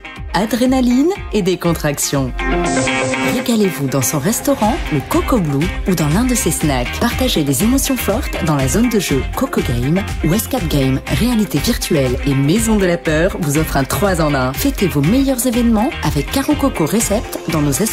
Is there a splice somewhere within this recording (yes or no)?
no